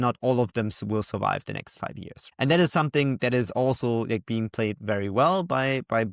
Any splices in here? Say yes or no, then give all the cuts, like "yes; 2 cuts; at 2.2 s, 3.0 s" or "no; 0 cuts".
yes; 1 cut; at 2.2 s